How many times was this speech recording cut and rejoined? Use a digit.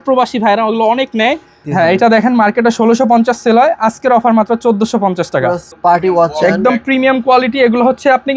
2